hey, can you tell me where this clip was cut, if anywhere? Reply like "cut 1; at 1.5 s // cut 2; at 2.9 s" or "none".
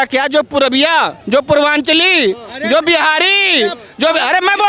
cut 1; at 1.2 s